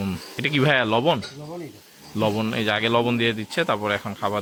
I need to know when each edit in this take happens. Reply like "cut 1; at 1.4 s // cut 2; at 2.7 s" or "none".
none